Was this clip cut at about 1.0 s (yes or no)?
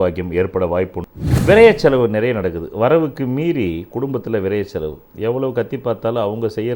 yes